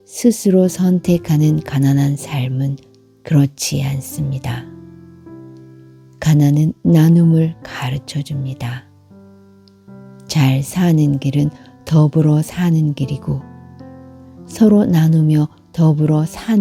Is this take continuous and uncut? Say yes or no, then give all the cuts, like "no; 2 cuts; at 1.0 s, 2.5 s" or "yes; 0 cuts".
yes; 0 cuts